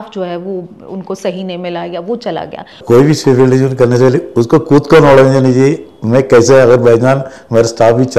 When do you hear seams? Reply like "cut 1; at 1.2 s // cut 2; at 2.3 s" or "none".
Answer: cut 1; at 2.8 s